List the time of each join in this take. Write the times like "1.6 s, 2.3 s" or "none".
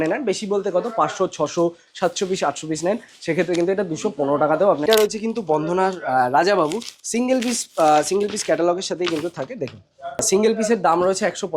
4.9 s, 10.2 s

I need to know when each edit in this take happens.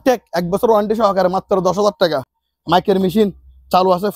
none

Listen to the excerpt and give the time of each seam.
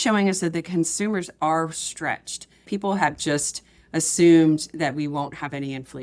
2.6 s

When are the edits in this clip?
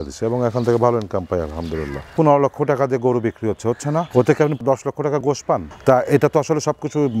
2.1 s, 5.7 s

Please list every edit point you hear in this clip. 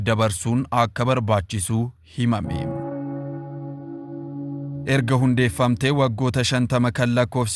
2.6 s, 4.8 s

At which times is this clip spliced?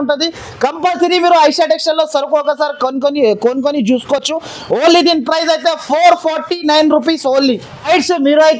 none

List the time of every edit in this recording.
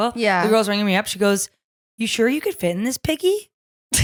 none

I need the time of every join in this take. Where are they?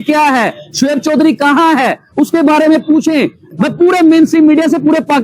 3.4 s

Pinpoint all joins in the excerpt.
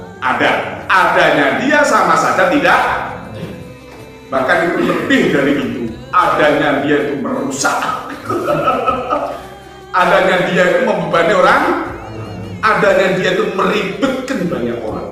none

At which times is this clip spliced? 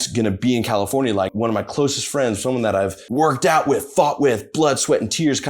1.3 s, 3.0 s

